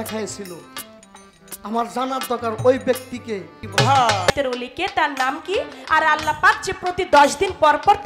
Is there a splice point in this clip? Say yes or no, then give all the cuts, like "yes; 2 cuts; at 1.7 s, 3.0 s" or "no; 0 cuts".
yes; 2 cuts; at 3.6 s, 4.3 s